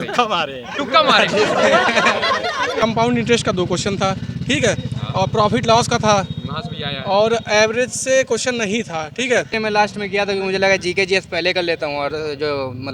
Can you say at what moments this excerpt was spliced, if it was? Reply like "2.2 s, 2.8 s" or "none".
2.8 s, 9.5 s